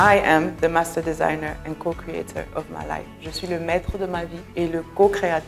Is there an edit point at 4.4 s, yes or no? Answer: yes